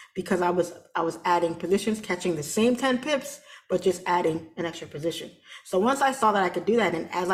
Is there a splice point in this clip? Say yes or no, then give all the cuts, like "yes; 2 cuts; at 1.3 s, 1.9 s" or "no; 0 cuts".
no; 0 cuts